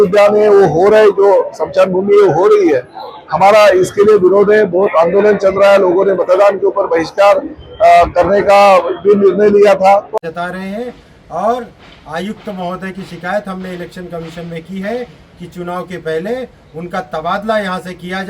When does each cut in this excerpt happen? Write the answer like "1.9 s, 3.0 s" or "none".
10.1 s